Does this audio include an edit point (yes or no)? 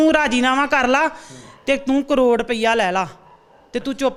no